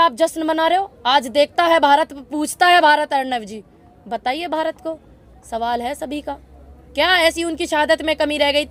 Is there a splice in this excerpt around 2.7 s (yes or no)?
no